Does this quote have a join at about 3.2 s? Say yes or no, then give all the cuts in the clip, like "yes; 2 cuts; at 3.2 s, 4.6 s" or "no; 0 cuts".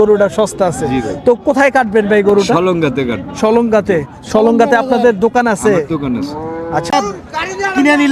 no; 1 cut; at 6.9 s